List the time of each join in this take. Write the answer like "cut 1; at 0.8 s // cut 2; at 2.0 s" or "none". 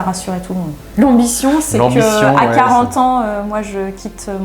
none